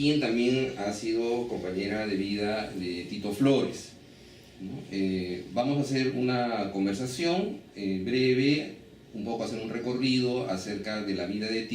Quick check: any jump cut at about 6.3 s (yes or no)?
yes